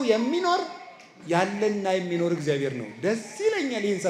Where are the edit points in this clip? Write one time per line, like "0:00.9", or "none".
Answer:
none

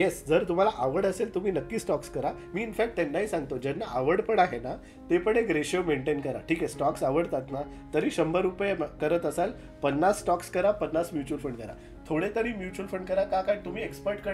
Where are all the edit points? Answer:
none

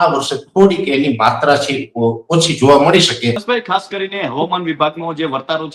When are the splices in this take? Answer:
0:03.4

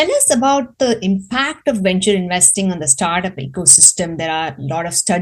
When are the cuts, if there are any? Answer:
none

